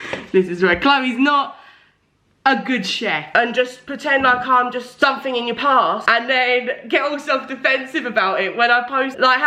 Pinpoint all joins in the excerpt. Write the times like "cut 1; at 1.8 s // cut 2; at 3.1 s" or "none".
cut 1; at 3.2 s